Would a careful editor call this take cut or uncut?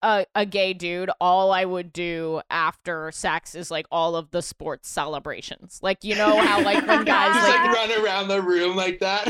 cut